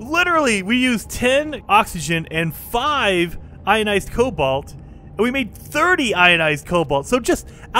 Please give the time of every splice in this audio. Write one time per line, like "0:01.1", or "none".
0:01.6